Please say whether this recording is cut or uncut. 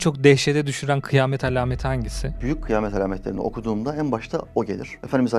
cut